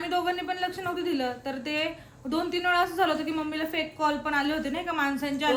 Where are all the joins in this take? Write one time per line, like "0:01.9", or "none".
none